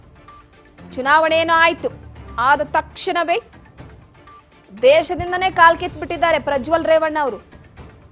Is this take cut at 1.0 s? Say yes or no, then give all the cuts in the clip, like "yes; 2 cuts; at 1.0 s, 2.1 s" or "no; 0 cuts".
yes; 1 cut; at 1.0 s